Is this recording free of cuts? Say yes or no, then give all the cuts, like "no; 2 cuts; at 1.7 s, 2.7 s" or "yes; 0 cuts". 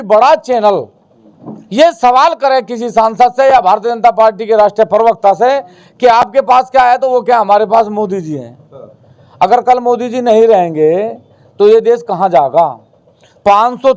yes; 0 cuts